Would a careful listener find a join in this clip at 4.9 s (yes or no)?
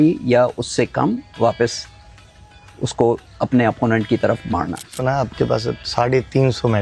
yes